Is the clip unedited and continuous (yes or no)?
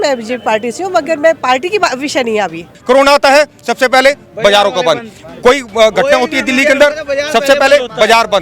no